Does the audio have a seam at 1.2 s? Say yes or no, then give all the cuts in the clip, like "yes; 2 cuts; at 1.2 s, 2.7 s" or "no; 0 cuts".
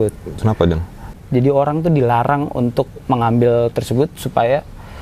no; 0 cuts